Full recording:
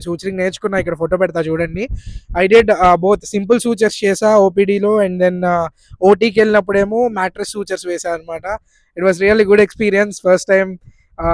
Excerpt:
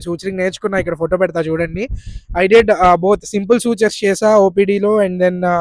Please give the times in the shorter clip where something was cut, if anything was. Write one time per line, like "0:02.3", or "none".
none